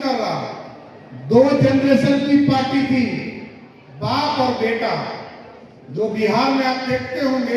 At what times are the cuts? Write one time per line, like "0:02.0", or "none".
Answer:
none